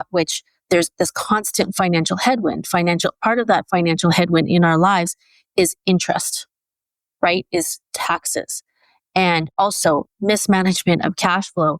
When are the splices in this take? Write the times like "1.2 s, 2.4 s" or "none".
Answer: none